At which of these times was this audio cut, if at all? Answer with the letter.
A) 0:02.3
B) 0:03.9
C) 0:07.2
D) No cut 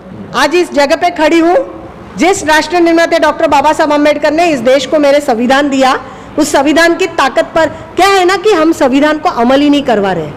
D